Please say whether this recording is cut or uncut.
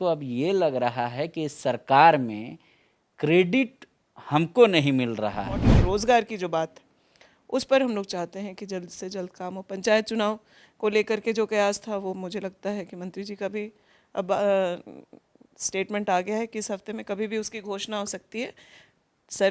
cut